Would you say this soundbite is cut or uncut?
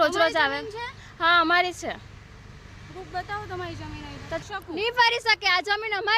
cut